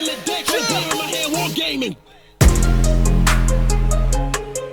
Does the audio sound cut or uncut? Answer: uncut